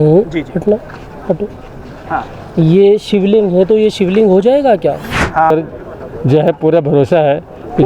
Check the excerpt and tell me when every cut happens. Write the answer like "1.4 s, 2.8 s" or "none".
5.5 s